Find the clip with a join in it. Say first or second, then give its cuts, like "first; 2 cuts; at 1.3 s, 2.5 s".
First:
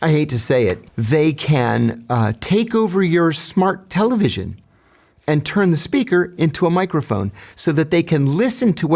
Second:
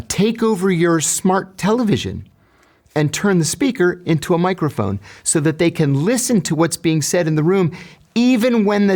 first; 1 cut; at 0.9 s